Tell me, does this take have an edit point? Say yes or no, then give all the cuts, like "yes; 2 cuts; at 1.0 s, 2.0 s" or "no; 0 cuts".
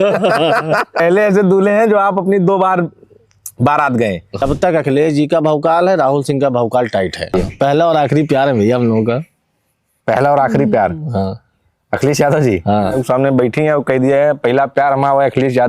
yes; 4 cuts; at 1.0 s, 4.4 s, 7.3 s, 12.9 s